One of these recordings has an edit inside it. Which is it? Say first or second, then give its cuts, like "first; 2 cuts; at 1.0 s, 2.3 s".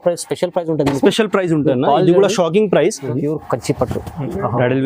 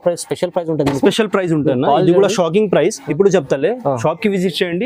first; 1 cut; at 3.0 s